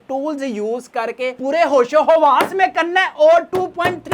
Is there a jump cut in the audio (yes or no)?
yes